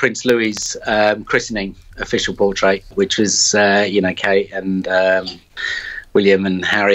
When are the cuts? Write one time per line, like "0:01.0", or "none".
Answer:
0:02.9